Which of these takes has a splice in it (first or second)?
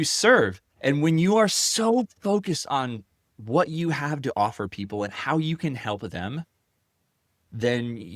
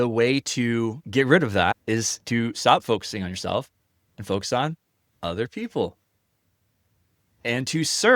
second